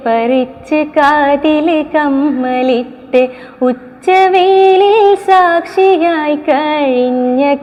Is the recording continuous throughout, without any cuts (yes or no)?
yes